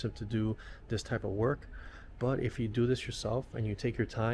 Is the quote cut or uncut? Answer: uncut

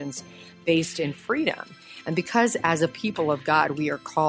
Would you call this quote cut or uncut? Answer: uncut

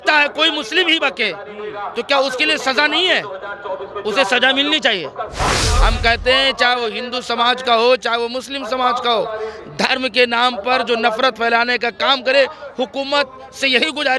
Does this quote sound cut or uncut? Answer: cut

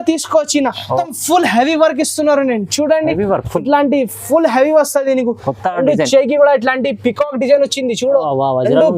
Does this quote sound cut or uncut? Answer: cut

